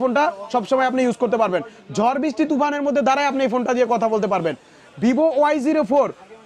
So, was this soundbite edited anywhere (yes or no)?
no